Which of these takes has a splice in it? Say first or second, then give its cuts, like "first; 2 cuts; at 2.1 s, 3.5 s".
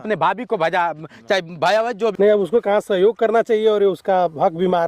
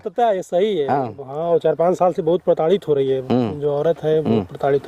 first; 1 cut; at 2.1 s